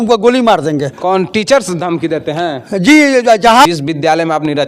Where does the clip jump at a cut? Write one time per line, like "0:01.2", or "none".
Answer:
0:03.7